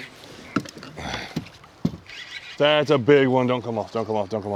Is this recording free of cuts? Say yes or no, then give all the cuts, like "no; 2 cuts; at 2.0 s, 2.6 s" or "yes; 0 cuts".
yes; 0 cuts